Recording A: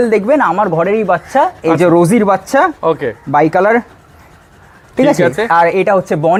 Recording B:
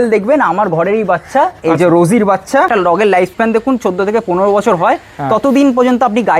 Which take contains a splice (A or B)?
B